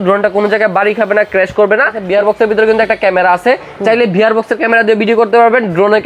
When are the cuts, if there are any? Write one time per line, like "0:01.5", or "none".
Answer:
0:02.0